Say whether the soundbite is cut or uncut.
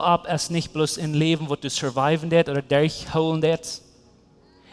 uncut